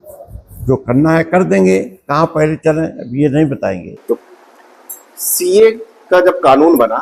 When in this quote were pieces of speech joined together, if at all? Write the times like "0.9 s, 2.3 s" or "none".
4.2 s